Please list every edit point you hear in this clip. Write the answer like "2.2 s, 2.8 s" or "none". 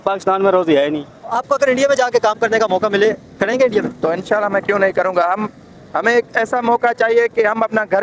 1.4 s

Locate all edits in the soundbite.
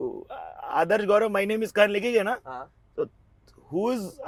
none

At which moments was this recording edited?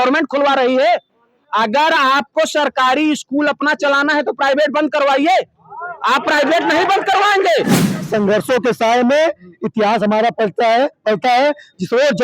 8.0 s

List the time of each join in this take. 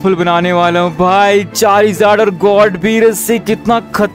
none

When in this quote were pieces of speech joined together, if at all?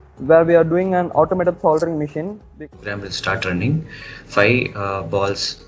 2.6 s

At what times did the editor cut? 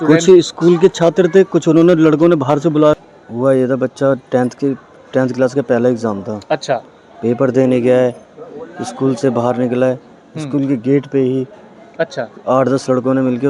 2.9 s

